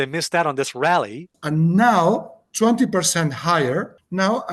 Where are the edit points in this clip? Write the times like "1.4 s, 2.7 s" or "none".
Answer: 1.3 s